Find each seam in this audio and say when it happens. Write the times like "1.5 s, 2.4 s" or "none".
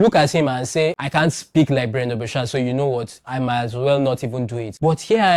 none